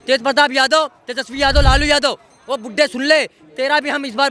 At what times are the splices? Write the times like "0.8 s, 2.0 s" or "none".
none